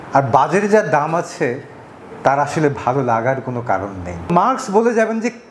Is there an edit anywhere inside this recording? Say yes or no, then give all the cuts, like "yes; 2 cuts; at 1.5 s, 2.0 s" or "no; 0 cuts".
yes; 1 cut; at 4.3 s